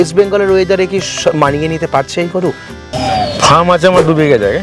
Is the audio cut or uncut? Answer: cut